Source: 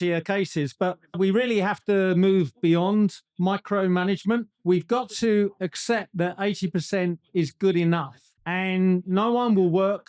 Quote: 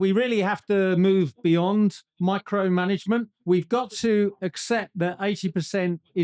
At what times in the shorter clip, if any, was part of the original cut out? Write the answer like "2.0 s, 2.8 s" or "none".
none